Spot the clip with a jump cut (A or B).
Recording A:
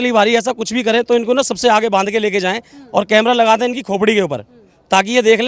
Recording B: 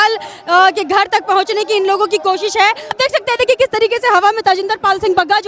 B